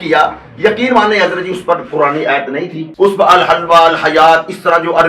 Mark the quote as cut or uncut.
cut